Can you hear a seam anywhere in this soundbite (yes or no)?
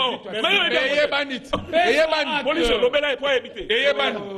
no